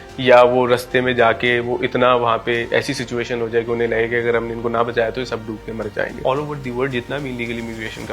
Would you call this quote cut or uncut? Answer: cut